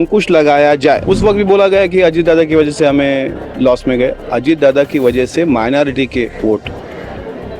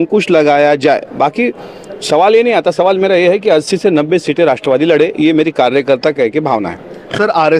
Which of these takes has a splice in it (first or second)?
first